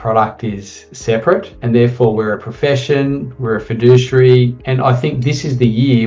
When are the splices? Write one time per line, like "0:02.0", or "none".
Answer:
0:04.6